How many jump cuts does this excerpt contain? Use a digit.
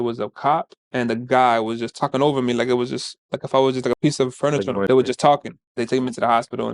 2